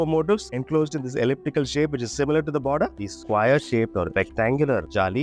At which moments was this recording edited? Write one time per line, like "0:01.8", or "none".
0:03.0